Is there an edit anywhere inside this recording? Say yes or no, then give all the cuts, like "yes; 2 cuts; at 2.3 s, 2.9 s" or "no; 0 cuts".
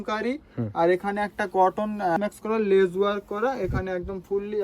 yes; 1 cut; at 2.2 s